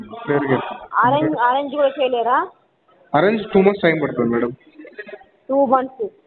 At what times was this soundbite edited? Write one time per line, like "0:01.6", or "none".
none